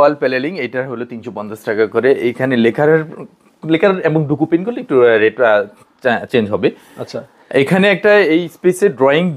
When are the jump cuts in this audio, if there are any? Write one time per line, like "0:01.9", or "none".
none